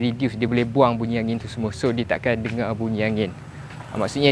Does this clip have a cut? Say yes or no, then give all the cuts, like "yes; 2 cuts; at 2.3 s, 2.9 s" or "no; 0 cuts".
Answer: no; 0 cuts